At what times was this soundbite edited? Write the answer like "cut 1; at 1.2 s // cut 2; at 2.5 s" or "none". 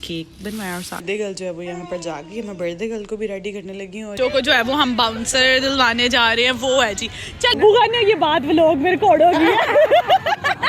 cut 1; at 1.0 s // cut 2; at 4.1 s // cut 3; at 7.5 s